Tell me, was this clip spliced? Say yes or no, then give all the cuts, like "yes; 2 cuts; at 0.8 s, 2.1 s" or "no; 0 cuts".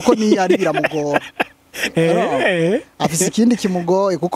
no; 0 cuts